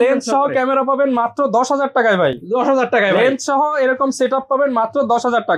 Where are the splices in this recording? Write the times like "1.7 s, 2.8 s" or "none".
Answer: none